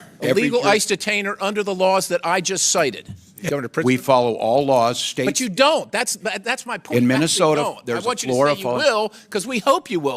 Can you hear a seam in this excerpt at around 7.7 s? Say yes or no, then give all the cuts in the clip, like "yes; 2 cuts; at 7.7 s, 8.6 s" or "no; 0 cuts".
no; 1 cut; at 3.2 s